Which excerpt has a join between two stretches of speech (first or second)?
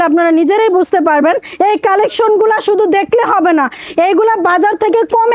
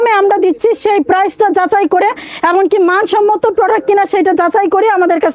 first